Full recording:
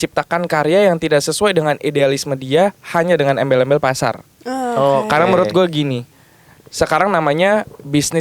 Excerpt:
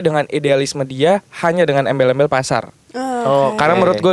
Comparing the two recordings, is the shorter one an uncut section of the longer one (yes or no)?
yes